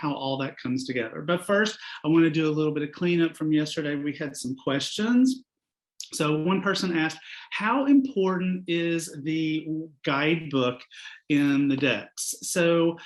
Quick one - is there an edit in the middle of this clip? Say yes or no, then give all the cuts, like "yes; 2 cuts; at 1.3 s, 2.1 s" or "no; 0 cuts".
no; 0 cuts